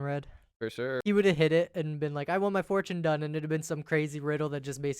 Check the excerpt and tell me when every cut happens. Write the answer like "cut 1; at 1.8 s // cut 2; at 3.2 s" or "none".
cut 1; at 1.0 s